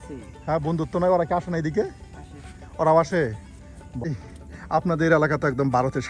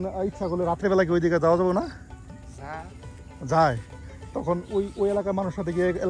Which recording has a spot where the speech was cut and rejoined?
first; 1 cut; at 4.1 s

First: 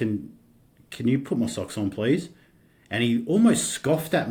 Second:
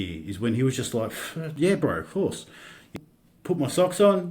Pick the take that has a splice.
second; 2 cuts; at 1.4 s, 2.9 s

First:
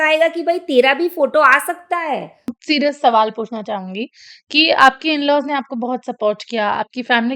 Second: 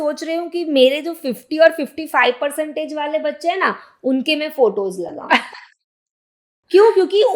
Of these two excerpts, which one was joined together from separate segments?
first; 1 cut; at 2.5 s

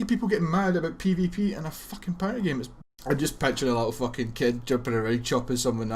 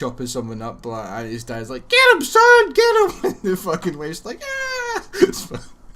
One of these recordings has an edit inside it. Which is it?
first; 1 cut; at 2.7 s

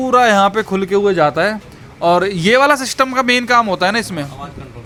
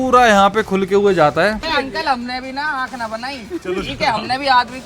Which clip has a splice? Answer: second; 1 cut; at 1.7 s

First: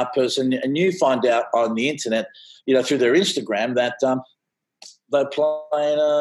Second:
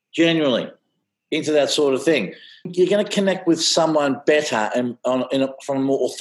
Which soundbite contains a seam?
second; 1 cut; at 2.7 s

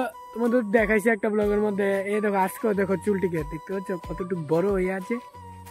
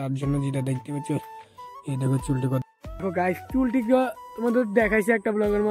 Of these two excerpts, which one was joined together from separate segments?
second; 1 cut; at 3.0 s

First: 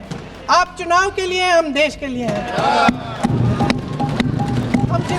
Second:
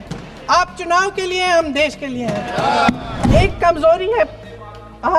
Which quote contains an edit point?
second; 1 cut; at 3.3 s

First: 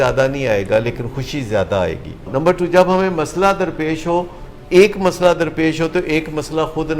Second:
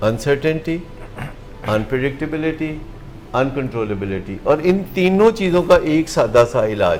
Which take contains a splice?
first; 1 cut; at 2.3 s

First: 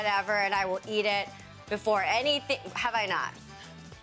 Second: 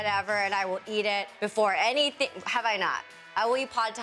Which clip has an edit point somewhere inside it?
second; 2 cuts; at 1.3 s, 3.1 s

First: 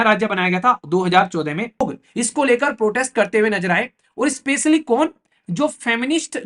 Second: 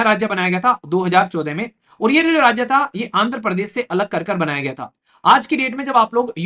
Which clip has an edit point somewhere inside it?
first; 1 cut; at 1.8 s

